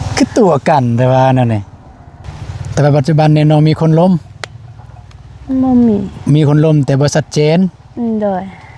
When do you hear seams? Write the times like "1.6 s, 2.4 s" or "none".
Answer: 2.1 s